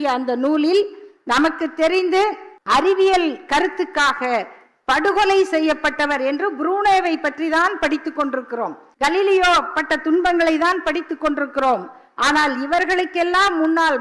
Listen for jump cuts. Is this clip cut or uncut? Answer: cut